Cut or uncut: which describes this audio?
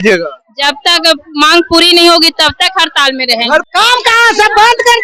cut